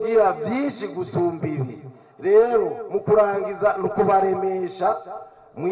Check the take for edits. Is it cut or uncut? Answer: uncut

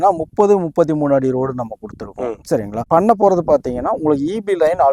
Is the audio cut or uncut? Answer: uncut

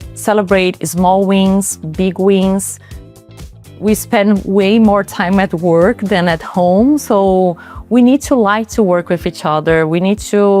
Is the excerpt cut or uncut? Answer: cut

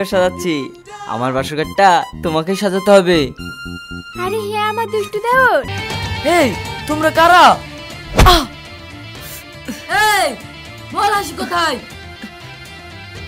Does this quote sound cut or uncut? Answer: cut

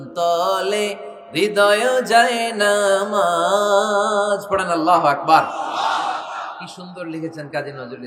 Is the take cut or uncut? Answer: uncut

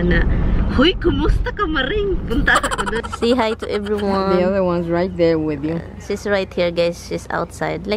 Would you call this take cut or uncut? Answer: cut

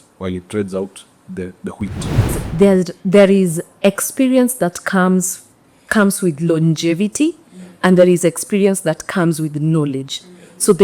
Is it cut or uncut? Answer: cut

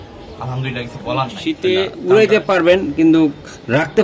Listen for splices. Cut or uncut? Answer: cut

